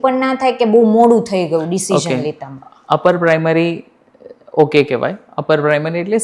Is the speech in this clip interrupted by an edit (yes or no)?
no